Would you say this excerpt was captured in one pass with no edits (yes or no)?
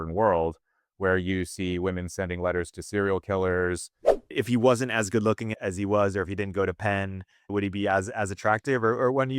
no